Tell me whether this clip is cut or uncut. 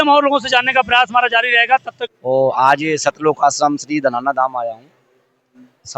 cut